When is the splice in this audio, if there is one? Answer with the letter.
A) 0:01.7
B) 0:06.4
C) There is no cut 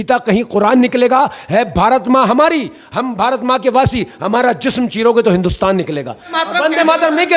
B